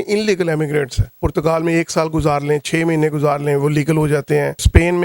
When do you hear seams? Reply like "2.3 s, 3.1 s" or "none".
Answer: 1.2 s